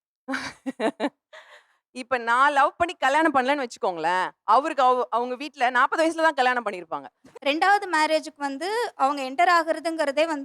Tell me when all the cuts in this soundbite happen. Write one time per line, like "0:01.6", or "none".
0:07.2